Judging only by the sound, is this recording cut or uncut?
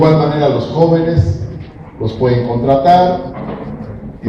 uncut